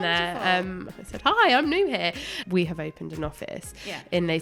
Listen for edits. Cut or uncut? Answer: cut